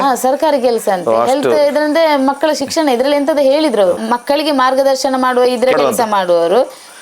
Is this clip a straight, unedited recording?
yes; 0 cuts

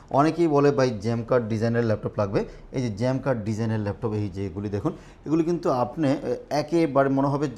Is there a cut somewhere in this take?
no; 0 cuts

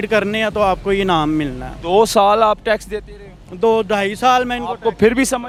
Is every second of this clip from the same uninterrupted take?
yes; 0 cuts

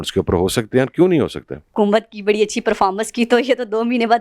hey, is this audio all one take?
no; 1 cut; at 1.7 s

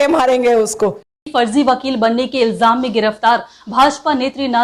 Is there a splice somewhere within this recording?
yes; 1 cut; at 1.1 s

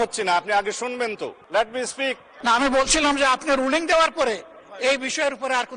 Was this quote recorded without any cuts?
no; 2 cuts; at 1.4 s, 2.3 s

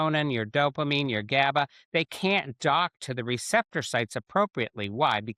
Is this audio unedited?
yes; 0 cuts

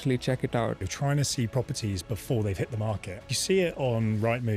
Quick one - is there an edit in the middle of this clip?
yes; 2 cuts; at 0.9 s, 3.2 s

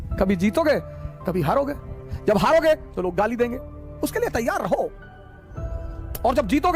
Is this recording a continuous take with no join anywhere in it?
yes; 0 cuts

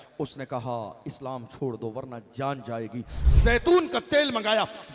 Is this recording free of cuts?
no; 1 cut; at 3.2 s

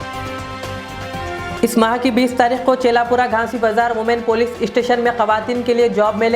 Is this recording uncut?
no; 1 cut; at 1.4 s

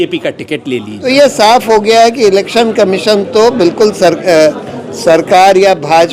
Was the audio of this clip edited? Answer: yes; 1 cut; at 0.9 s

